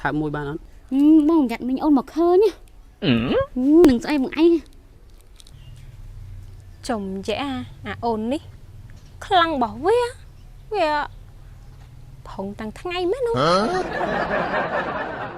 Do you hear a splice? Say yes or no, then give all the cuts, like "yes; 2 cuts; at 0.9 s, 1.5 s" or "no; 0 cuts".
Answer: yes; 1 cut; at 13.4 s